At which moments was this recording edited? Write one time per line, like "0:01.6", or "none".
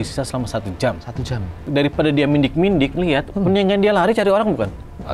0:01.6